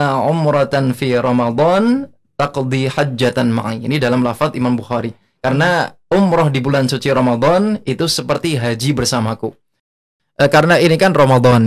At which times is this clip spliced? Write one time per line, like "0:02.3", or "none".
0:10.0

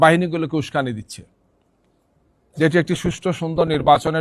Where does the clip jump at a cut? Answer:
none

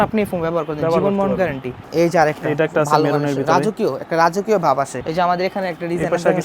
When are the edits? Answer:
0:01.7
0:05.0

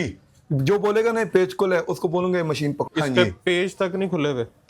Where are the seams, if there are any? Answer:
0:02.8

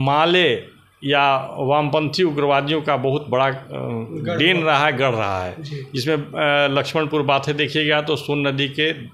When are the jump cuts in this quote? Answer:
none

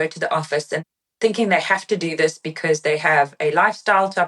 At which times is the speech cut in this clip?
0:01.0

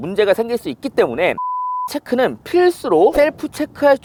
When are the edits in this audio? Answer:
none

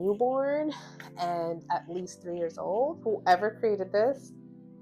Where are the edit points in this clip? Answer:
0:03.0

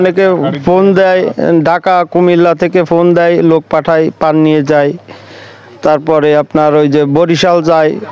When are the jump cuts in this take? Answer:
none

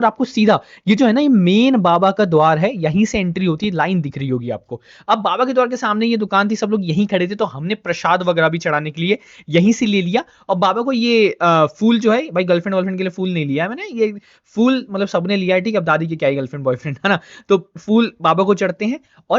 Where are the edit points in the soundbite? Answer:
none

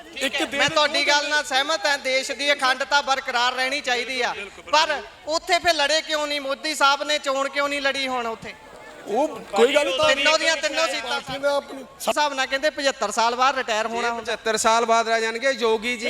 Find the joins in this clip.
0:12.1

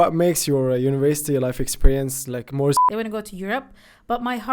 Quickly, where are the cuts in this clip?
0:02.8

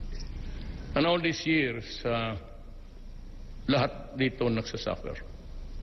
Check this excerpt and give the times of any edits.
0:01.5

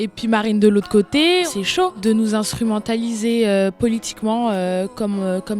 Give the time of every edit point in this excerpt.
0:01.5

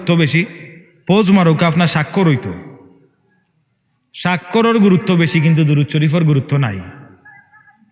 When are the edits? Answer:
none

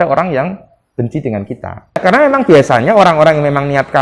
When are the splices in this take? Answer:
0:02.0

